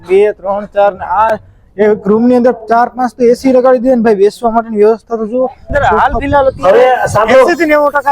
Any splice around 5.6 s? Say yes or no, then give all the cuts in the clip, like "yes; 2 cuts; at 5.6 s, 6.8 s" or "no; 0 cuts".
yes; 1 cut; at 5.6 s